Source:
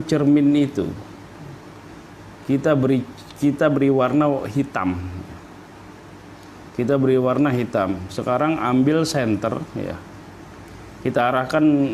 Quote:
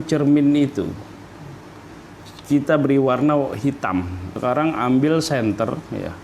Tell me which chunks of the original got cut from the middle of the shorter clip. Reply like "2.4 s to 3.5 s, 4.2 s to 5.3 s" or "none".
2.3 s to 3.2 s, 5.2 s to 8.1 s